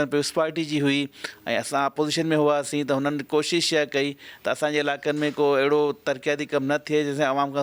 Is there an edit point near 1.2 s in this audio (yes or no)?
no